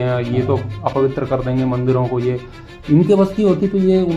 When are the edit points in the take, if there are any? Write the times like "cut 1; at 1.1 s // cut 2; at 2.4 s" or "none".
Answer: none